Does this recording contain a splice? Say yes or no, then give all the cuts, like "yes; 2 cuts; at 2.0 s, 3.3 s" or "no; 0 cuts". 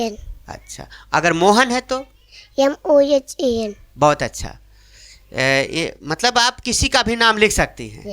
no; 0 cuts